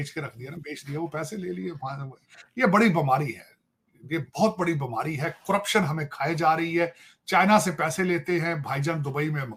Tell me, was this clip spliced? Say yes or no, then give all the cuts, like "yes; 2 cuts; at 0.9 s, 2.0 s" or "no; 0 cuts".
no; 0 cuts